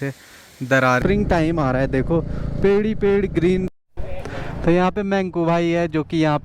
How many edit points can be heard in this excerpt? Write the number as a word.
two